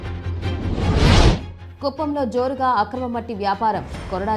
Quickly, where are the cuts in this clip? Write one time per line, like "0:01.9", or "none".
0:01.5